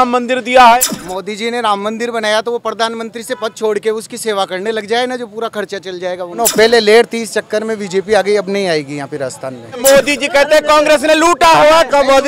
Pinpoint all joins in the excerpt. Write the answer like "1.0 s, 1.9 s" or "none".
0.8 s, 6.3 s, 9.8 s